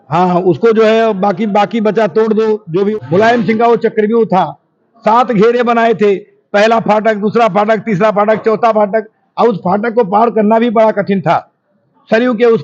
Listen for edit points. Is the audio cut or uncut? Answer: cut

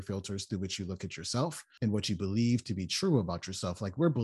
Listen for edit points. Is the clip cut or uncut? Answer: cut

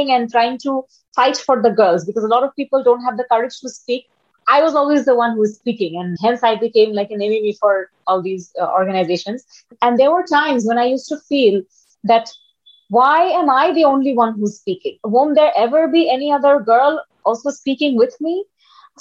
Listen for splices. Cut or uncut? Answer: cut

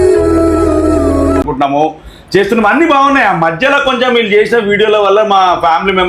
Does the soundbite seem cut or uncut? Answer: cut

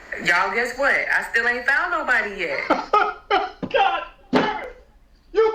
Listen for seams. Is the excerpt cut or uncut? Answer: cut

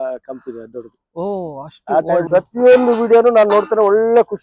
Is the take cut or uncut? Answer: cut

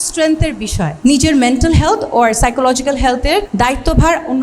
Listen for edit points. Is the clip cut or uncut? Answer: cut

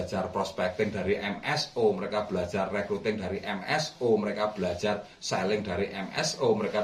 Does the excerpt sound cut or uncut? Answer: uncut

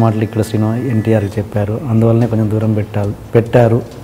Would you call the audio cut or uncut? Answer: uncut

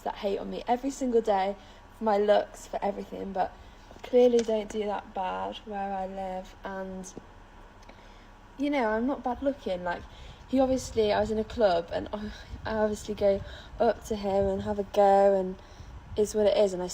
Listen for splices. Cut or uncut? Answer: cut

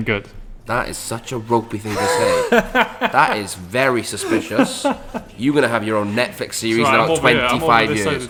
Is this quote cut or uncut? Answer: uncut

